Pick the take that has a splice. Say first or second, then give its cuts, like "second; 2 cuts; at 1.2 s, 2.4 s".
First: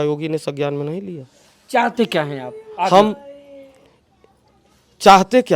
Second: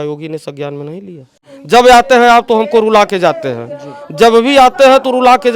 second; 1 cut; at 1.5 s